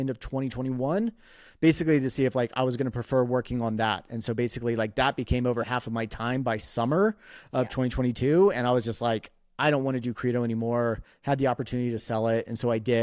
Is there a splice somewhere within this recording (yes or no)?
no